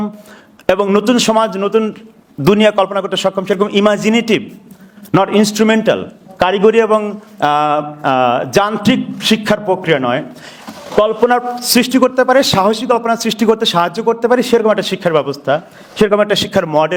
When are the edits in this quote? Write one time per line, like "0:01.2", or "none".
none